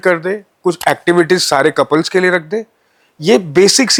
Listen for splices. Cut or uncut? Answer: uncut